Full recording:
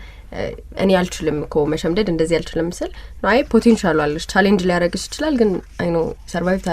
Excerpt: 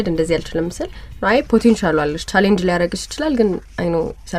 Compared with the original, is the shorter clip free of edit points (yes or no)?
yes